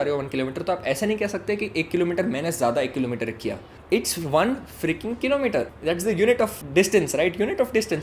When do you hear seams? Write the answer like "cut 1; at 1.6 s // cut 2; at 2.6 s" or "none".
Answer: cut 1; at 3.7 s // cut 2; at 5.7 s // cut 3; at 6.6 s